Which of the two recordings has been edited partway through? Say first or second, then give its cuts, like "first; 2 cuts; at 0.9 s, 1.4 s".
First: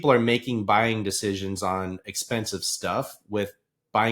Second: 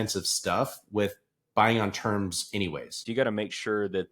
second; 1 cut; at 3.0 s